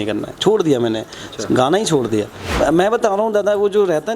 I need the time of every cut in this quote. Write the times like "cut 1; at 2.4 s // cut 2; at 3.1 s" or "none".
cut 1; at 2.6 s